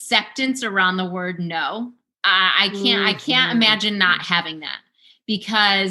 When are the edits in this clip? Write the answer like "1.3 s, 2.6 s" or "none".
2.2 s